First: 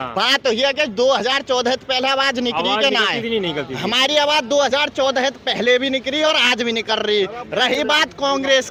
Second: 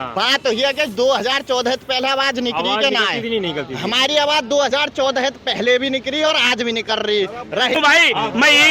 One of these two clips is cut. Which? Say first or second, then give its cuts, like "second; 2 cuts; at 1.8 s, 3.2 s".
second; 1 cut; at 7.8 s